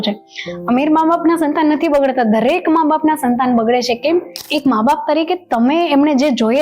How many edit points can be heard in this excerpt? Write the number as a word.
one